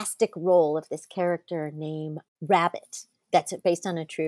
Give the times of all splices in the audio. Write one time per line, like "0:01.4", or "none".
none